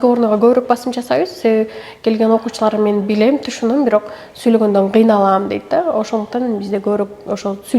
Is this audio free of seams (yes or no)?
yes